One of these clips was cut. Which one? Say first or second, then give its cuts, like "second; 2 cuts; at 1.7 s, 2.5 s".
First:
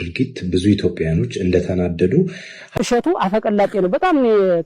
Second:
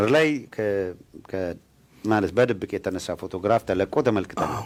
first; 1 cut; at 2.6 s